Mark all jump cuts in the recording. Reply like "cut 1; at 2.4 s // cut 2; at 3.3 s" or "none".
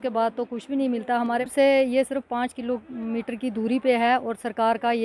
cut 1; at 1.5 s